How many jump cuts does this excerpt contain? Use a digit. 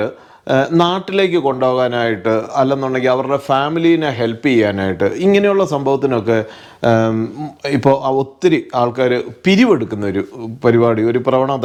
0